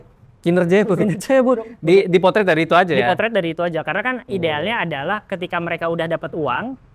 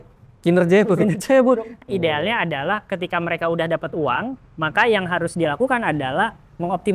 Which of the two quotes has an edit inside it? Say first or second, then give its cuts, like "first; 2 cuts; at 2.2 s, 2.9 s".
second; 1 cut; at 1.7 s